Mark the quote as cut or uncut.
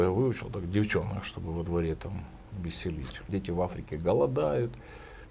cut